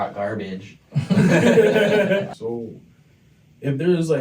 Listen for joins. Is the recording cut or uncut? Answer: cut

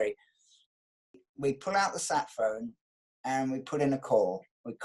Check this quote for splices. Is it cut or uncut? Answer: cut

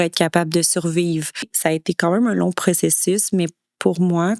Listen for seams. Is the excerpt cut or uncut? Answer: cut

